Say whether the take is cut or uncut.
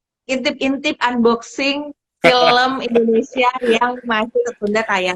uncut